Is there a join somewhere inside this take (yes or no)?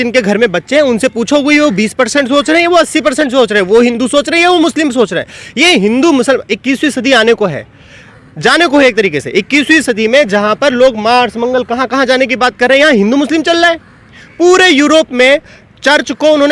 no